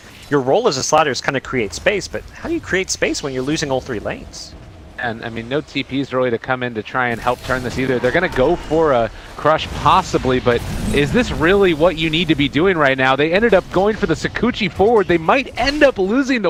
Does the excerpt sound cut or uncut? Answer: uncut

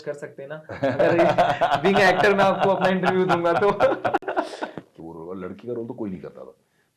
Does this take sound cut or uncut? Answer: cut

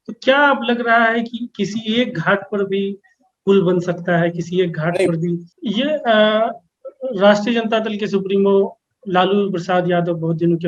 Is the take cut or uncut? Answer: cut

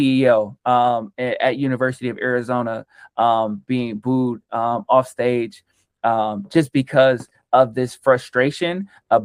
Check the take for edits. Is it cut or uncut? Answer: uncut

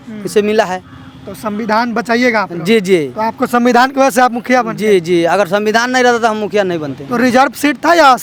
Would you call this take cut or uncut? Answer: uncut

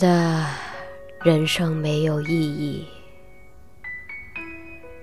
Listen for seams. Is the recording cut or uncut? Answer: cut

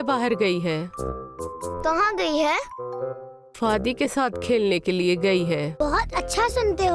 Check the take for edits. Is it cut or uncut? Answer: cut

